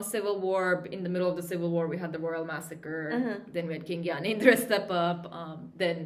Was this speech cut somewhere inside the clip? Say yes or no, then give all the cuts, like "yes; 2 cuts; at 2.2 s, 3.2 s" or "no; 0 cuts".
no; 0 cuts